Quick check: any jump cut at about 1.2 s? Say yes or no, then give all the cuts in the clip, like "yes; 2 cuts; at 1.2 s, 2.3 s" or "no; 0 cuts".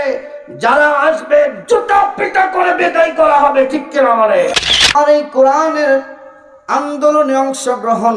no; 1 cut; at 4.9 s